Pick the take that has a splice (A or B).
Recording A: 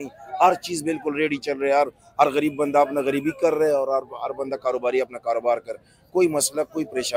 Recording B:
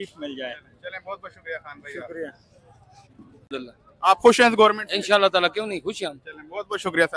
B